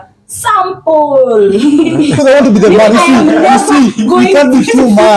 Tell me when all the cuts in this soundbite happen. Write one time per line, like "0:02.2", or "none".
0:02.2